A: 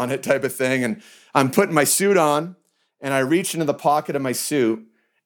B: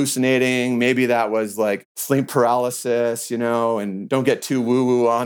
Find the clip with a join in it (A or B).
B